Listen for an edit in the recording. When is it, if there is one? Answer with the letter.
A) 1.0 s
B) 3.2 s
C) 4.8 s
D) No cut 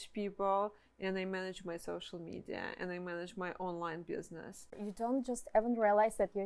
C